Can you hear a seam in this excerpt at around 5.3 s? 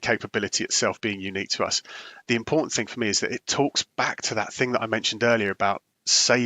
no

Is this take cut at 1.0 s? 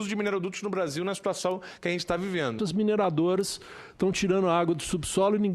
no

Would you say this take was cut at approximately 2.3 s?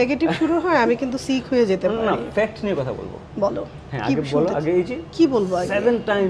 no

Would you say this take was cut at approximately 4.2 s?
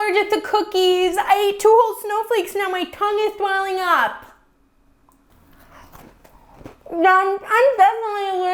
no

